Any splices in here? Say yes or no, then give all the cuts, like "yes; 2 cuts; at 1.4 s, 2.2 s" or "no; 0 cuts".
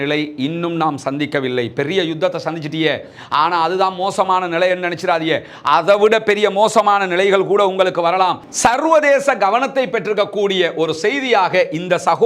yes; 1 cut; at 8.5 s